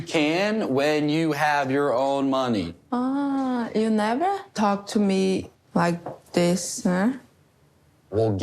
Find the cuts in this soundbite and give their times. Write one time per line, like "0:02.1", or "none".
0:04.5
0:05.6